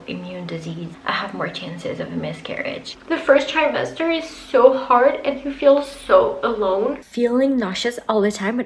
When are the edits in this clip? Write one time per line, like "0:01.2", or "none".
0:01.0
0:02.9
0:07.0